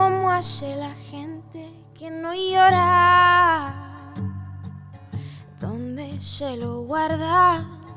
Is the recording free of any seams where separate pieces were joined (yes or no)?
yes